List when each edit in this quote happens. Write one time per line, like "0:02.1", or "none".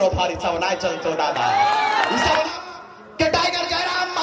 0:02.5